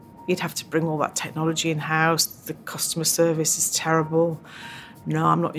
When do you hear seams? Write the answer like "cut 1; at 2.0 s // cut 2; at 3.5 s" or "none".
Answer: none